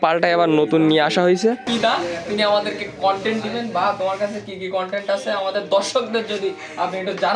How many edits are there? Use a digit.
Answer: 1